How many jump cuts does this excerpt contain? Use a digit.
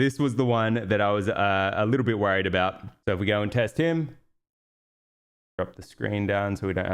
1